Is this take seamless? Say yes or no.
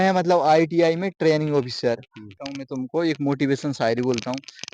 no